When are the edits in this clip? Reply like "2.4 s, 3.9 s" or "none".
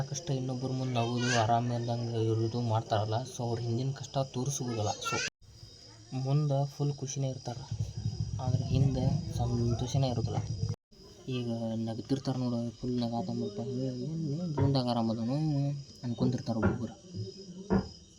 5.3 s